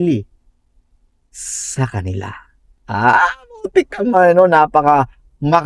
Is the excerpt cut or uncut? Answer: uncut